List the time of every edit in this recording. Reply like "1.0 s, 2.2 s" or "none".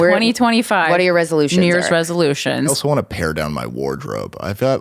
2.8 s